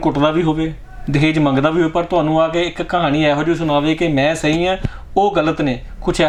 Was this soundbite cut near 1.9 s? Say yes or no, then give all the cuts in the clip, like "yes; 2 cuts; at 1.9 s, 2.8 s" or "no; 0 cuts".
no; 0 cuts